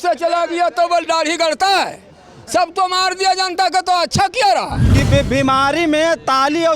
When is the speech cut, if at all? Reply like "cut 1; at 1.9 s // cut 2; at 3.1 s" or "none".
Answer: cut 1; at 4.8 s